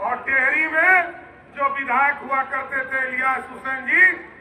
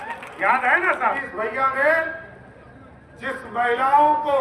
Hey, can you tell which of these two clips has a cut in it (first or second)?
second